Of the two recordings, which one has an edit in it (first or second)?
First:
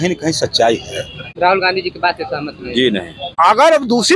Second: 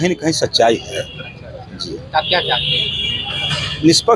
first